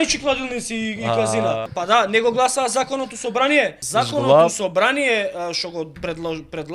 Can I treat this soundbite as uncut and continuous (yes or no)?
no